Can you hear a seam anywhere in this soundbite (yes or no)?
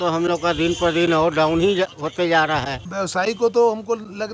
yes